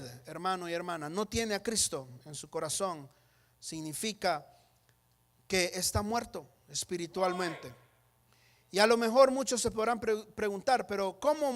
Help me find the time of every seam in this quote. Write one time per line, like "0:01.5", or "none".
none

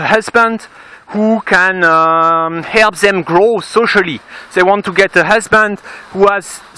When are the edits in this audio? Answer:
0:01.5

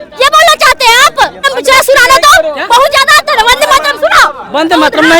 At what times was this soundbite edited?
0:01.5

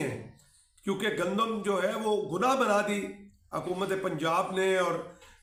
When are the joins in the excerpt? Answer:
none

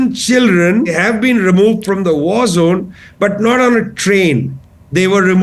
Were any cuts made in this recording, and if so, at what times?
0:01.0

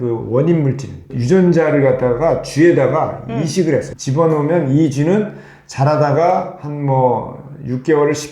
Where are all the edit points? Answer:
0:01.1
0:04.0

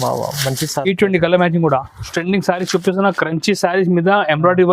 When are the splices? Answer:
0:02.1

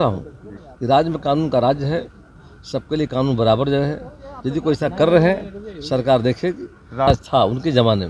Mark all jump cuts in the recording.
0:07.1

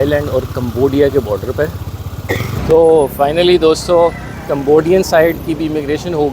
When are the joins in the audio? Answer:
0:02.6

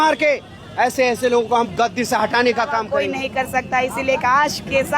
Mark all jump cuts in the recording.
0:02.9

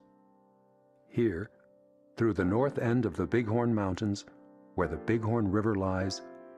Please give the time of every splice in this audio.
0:02.3

